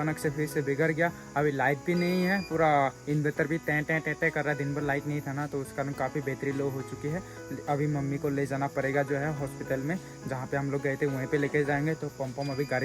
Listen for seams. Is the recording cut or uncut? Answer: uncut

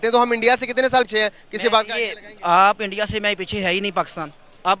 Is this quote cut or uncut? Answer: cut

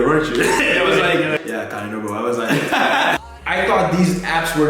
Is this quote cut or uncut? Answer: cut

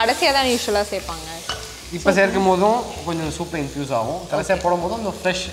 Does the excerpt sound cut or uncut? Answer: uncut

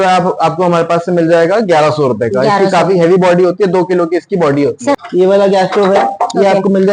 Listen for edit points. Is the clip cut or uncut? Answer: cut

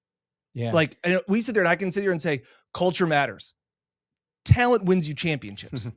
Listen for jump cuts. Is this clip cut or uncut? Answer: uncut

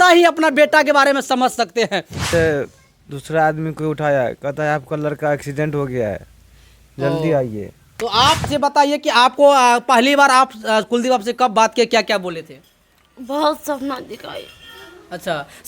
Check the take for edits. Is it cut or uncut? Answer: cut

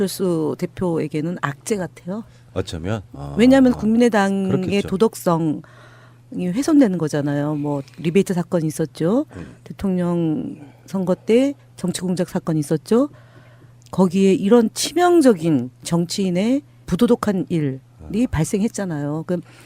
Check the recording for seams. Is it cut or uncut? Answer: uncut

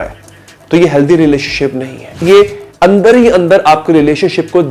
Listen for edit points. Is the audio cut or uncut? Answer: cut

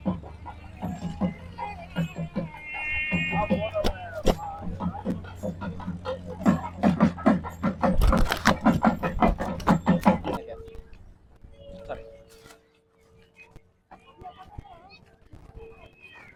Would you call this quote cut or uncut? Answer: uncut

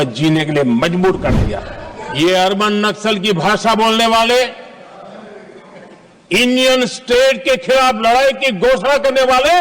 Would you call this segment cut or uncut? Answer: cut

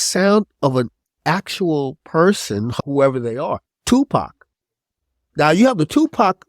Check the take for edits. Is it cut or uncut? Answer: cut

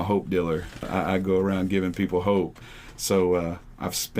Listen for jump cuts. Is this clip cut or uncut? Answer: cut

